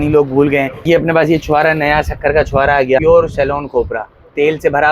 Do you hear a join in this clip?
yes; 2 cuts; at 0.8 s, 3.0 s

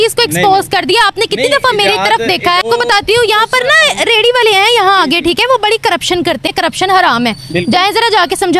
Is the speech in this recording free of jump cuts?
no; 2 cuts; at 2.6 s, 6.5 s

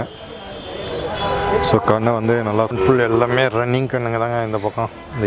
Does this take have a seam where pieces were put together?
yes; 1 cut; at 2.7 s

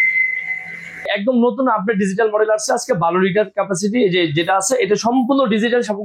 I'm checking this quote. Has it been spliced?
yes; 1 cut; at 1.1 s

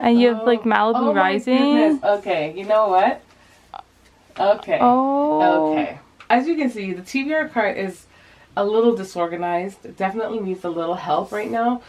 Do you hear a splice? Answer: no; 0 cuts

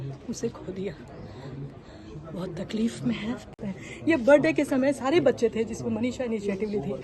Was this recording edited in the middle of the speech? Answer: yes; 1 cut; at 3.5 s

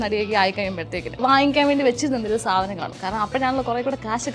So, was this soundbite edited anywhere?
yes; 1 cut; at 1.2 s

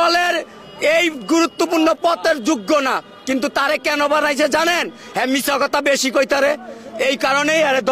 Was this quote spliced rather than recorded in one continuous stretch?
no; 0 cuts

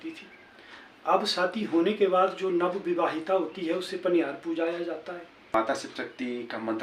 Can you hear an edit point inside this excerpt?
yes; 1 cut; at 5.5 s

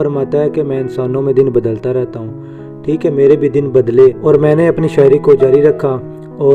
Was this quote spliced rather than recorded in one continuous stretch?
no; 0 cuts

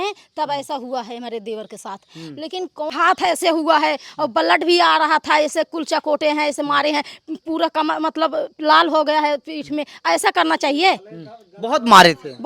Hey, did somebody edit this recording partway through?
yes; 1 cut; at 2.9 s

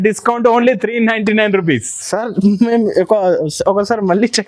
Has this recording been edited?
no; 0 cuts

